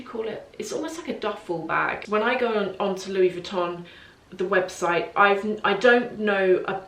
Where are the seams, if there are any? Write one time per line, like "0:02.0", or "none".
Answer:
0:02.0